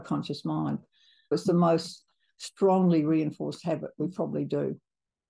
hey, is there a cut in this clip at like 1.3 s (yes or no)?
yes